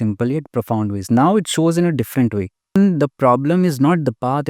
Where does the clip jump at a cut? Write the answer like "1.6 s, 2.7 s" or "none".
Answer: 2.8 s